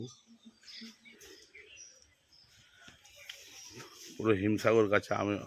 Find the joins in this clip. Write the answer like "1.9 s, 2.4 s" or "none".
1.0 s